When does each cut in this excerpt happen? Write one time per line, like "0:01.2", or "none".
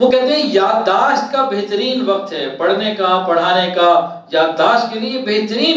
none